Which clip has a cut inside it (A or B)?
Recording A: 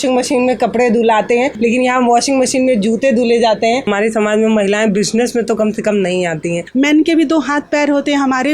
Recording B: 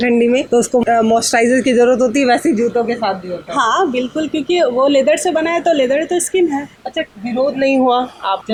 A